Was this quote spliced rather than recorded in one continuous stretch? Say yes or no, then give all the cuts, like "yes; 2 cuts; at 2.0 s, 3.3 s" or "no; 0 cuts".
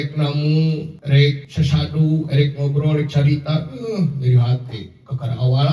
yes; 1 cut; at 1.2 s